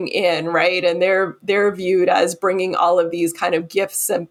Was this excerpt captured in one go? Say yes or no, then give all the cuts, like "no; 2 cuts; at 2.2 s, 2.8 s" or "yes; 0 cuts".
yes; 0 cuts